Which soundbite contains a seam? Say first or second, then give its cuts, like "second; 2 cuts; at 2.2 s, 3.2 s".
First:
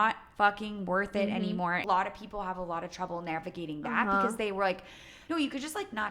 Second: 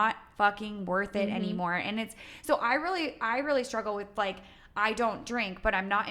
first; 2 cuts; at 1.8 s, 5.1 s